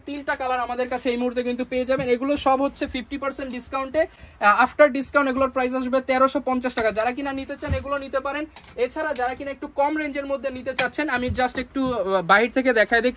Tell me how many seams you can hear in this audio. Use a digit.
0